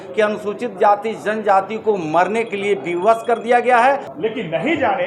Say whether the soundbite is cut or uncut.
cut